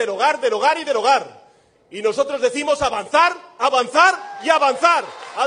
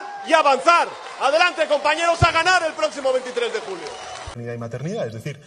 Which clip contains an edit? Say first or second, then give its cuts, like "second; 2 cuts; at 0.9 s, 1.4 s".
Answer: second; 1 cut; at 4.3 s